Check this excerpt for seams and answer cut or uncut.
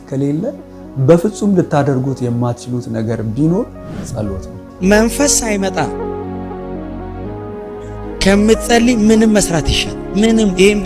cut